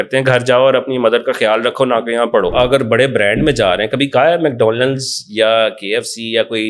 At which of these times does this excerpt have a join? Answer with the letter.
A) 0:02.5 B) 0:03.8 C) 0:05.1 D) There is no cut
A